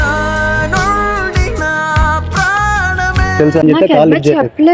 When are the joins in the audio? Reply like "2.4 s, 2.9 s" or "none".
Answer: 3.6 s